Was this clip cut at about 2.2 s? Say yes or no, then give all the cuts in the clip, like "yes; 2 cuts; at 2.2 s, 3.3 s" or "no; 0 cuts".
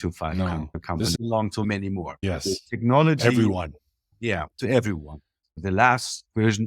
yes; 2 cuts; at 1.1 s, 2.2 s